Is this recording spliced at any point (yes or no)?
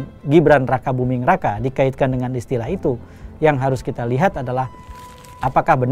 no